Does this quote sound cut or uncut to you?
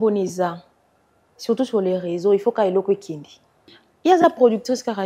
cut